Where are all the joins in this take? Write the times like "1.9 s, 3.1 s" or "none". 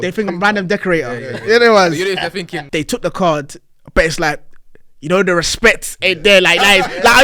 2.6 s

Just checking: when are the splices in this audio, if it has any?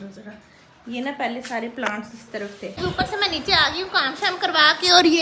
2.8 s

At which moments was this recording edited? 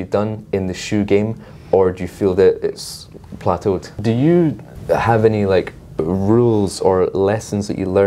3.9 s, 4.7 s

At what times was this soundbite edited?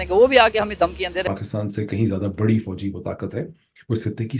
1.2 s

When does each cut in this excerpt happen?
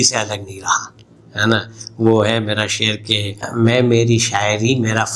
none

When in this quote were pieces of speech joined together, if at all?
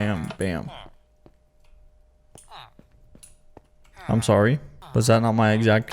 4.7 s

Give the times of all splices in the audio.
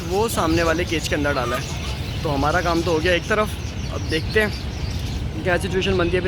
none

